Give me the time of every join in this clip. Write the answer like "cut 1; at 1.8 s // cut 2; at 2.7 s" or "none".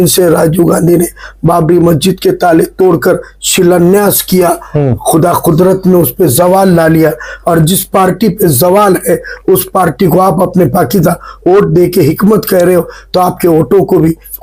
none